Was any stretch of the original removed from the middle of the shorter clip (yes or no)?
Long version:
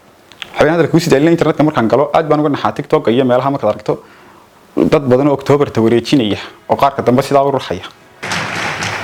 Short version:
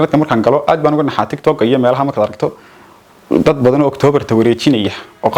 no